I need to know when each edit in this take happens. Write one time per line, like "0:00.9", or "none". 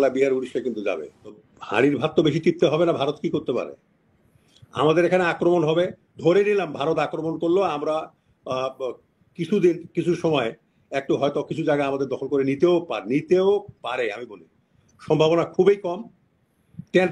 0:01.5